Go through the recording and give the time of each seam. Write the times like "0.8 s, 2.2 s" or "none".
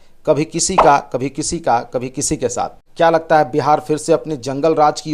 2.8 s